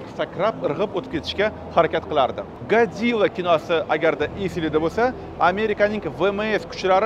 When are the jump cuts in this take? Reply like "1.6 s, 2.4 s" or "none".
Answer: 2.5 s